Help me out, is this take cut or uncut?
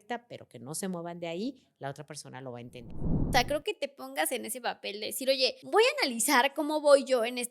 cut